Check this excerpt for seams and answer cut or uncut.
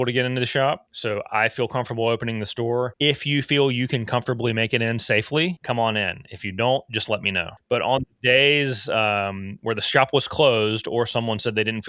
cut